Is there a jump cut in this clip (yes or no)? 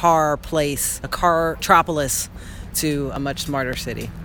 yes